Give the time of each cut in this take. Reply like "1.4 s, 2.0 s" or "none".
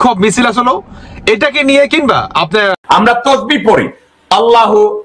2.7 s